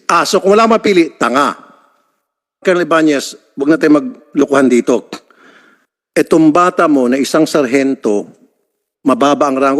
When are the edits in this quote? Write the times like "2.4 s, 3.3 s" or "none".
2.6 s